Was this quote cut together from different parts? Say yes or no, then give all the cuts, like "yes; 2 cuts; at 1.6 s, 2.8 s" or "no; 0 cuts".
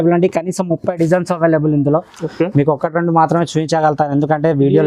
no; 0 cuts